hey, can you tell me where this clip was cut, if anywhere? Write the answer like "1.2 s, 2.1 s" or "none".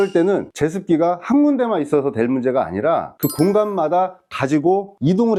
none